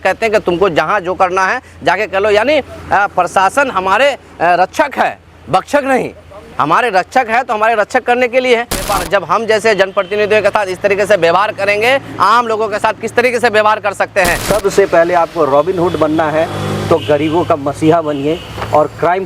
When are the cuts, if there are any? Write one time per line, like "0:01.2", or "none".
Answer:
0:08.9
0:14.4